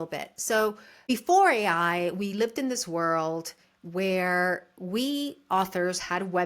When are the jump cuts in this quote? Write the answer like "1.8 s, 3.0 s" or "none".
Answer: 1.0 s

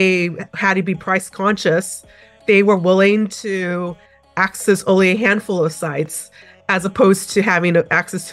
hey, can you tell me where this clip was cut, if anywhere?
none

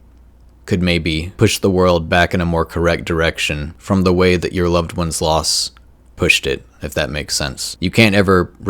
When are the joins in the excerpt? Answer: 1.3 s, 3.7 s, 7.6 s

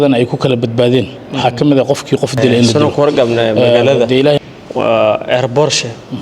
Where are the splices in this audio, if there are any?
2.7 s

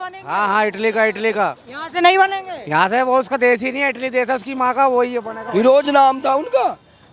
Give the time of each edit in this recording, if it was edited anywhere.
5.4 s

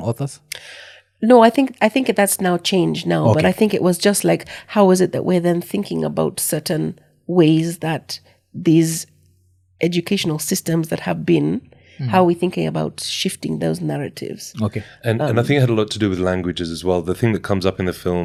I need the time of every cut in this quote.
none

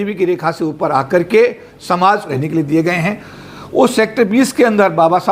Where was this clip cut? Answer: 2.3 s

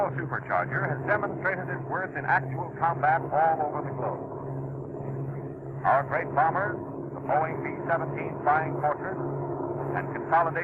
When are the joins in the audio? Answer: 7.2 s

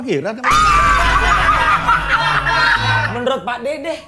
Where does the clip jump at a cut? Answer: 3.1 s

